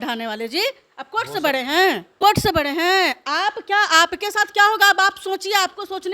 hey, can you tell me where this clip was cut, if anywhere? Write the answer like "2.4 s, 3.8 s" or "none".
2.1 s